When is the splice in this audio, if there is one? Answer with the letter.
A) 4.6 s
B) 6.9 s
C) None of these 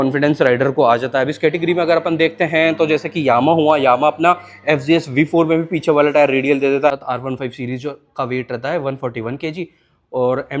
B